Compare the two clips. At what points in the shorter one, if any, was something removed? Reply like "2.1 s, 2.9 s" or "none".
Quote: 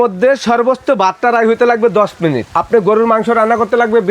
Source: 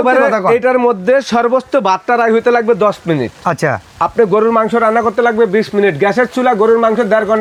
2.4 s